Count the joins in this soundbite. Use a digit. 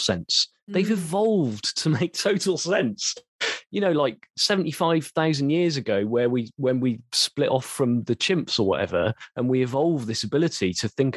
0